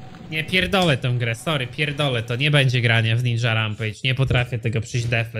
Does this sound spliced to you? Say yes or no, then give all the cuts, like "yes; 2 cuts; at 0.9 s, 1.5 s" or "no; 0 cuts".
no; 0 cuts